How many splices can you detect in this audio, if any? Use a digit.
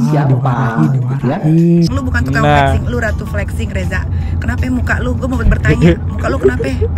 1